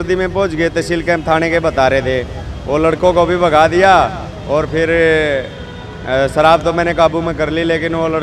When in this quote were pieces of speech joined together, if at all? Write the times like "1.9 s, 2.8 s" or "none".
none

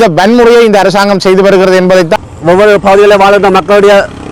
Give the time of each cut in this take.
2.2 s

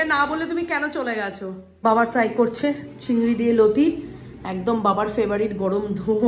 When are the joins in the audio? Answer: 1.8 s

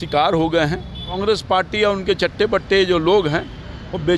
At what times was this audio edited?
1.2 s

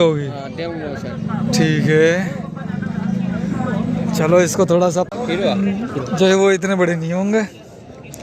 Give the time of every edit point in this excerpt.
5.5 s

